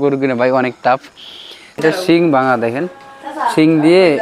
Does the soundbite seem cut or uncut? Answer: cut